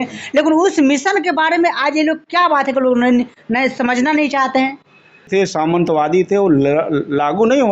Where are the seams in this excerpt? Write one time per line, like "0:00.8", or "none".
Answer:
0:05.3